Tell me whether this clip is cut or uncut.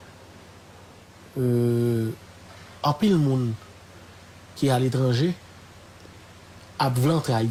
uncut